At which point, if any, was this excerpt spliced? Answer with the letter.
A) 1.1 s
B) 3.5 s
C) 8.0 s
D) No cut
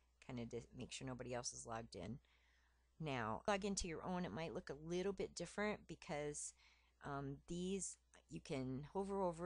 B